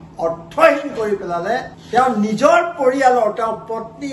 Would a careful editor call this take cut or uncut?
cut